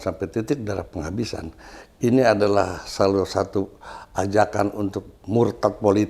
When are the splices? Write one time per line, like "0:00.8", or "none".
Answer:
none